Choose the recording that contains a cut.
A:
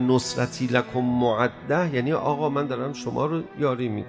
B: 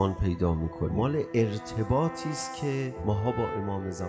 B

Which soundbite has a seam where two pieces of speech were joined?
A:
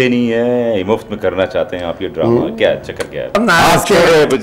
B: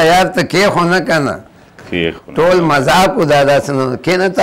A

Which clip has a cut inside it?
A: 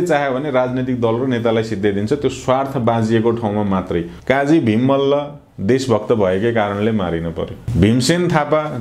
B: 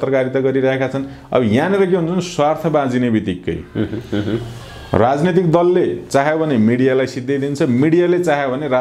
A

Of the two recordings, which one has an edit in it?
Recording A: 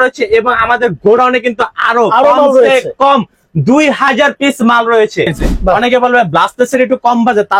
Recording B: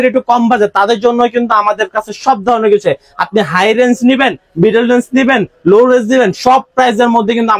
A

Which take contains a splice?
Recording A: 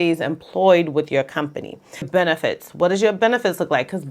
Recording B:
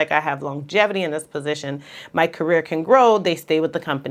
A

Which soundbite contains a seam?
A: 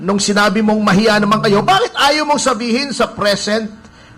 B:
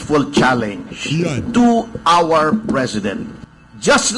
B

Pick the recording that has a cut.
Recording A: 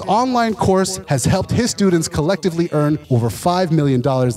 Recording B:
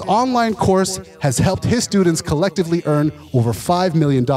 A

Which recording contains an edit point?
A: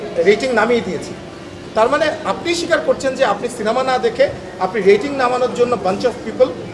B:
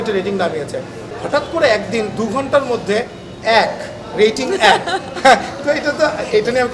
B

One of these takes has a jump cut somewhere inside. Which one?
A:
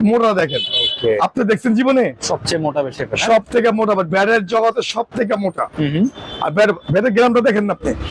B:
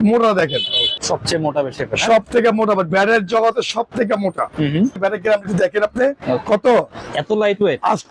B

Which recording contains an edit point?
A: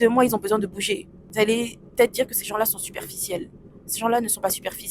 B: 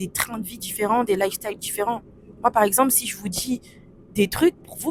A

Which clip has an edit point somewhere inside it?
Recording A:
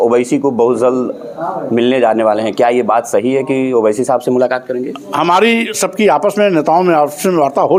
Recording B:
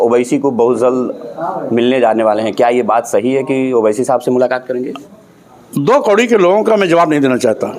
B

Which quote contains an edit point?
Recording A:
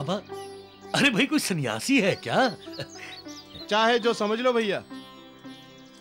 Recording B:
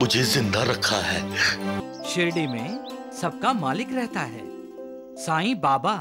B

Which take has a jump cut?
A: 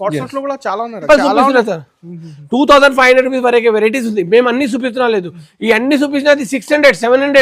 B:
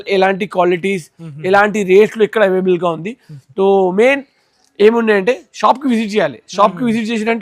A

